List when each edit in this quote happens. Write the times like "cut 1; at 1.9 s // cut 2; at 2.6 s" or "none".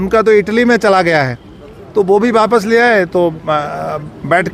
none